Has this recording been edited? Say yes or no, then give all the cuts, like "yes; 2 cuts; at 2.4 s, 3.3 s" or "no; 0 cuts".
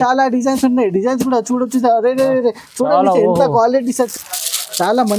yes; 1 cut; at 4.1 s